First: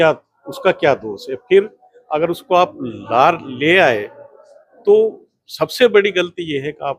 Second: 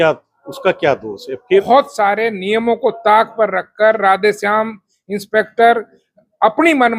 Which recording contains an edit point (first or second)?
second